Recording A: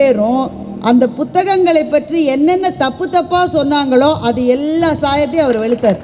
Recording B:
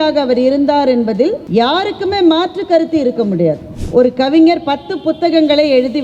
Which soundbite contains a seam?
B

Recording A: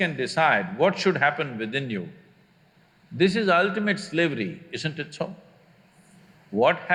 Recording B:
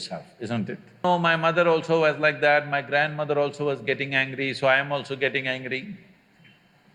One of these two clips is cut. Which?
B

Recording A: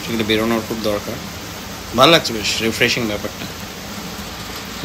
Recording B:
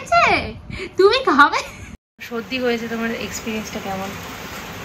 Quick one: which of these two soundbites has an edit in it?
B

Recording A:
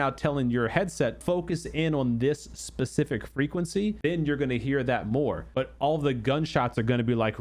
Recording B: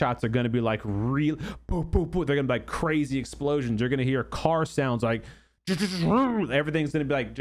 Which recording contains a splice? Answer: A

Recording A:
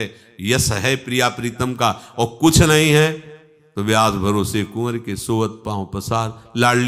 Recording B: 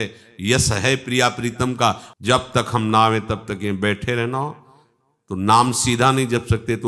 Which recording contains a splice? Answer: B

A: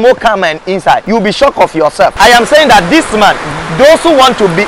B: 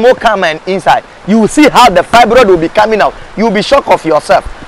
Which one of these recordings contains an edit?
A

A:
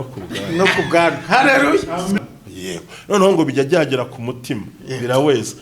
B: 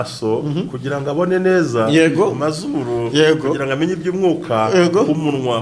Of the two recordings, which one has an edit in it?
A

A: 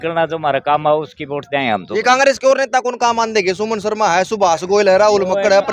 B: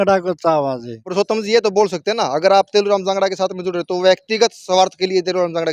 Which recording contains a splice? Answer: B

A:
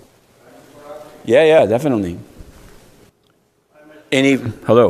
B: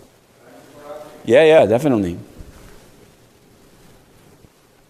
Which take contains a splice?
A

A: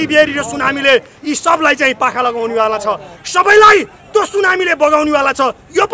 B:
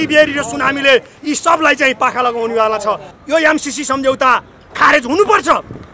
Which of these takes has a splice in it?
B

